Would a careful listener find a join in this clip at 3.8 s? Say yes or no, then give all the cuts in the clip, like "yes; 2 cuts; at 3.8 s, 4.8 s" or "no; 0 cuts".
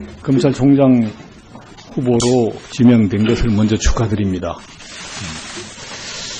no; 0 cuts